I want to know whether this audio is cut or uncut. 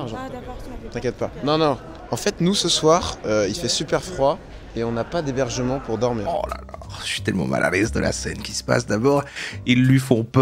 cut